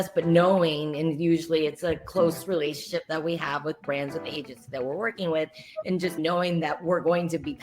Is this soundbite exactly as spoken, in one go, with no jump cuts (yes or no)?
no